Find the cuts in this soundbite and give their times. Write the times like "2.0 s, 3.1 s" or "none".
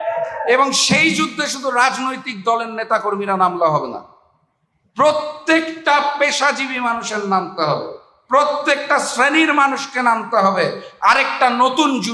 none